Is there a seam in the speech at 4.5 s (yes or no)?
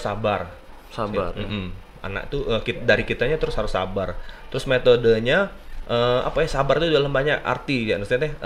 no